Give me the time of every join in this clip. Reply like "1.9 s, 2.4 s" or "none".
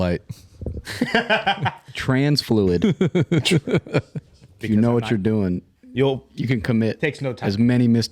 4.6 s